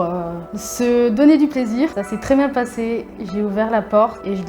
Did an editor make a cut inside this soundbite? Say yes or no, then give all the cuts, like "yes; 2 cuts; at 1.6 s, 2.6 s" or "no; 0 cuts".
yes; 1 cut; at 2.0 s